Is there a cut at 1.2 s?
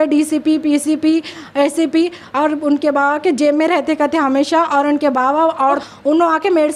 no; 1 cut; at 5.8 s

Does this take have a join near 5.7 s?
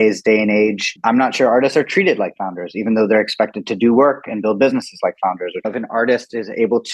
yes; 2 cuts; at 0.9 s, 5.7 s

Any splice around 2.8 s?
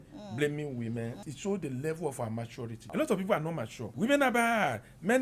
yes; 3 cuts; at 1.2 s, 2.8 s, 3.8 s

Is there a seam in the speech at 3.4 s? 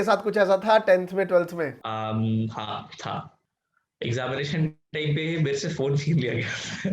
yes; 2 cuts; at 1.8 s, 3.4 s

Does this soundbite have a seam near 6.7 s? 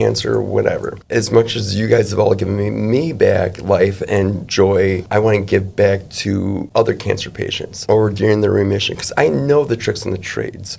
yes; 4 cuts; at 0.9 s, 5.0 s, 6.7 s, 7.8 s

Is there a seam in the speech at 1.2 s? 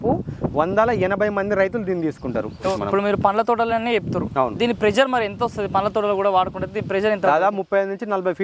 no; 1 cut; at 2.8 s

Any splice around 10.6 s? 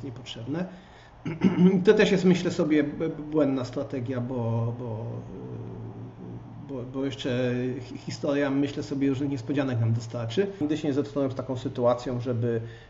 yes; 1 cut; at 10.6 s

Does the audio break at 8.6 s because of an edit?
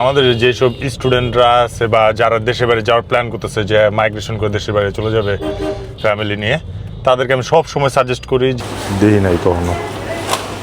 yes; 1 cut; at 8.6 s

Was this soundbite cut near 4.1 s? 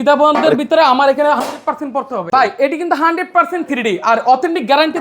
no; 1 cut; at 2.3 s

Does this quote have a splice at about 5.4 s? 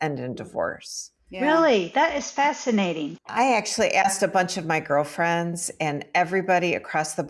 no; 1 cut; at 3.3 s

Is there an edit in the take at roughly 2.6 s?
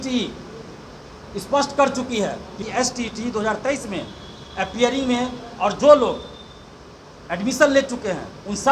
yes; 1 cut; at 2.6 s

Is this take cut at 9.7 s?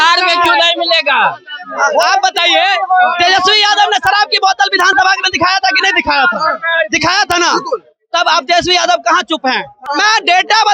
yes; 1 cut; at 9.7 s

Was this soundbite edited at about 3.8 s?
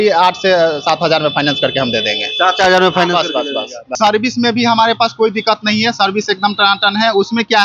yes; 1 cut; at 3.8 s

